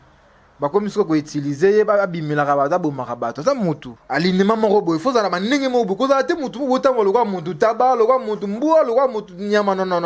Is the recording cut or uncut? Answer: cut